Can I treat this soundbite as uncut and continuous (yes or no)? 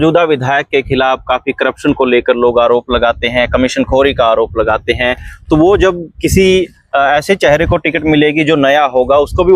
yes